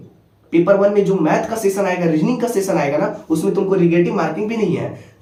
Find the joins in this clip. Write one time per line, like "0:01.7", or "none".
none